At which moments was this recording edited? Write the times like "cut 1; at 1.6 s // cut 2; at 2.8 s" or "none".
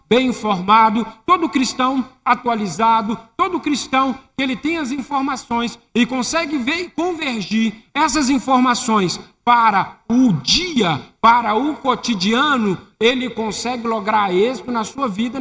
none